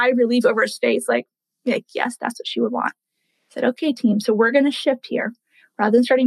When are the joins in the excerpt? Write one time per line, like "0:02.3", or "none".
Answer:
none